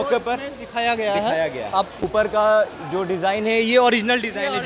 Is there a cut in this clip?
yes; 1 cut; at 2.1 s

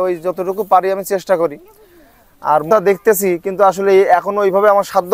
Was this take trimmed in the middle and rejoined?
yes; 1 cut; at 2.6 s

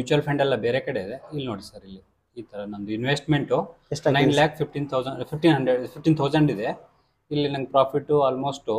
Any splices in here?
no; 0 cuts

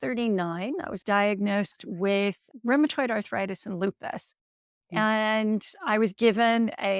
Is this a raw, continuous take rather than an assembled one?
no; 1 cut; at 1.0 s

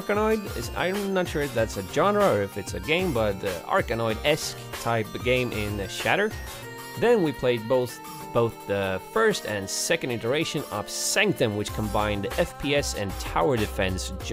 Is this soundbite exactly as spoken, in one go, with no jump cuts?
yes; 0 cuts

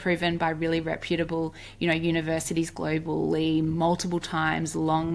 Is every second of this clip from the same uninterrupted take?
yes; 0 cuts

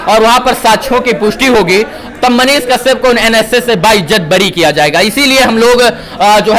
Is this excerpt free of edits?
yes; 0 cuts

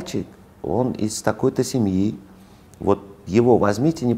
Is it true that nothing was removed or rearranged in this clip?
yes; 0 cuts

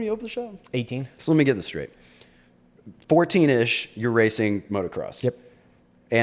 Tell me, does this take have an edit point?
no; 0 cuts

